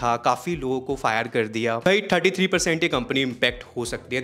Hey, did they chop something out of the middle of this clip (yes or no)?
yes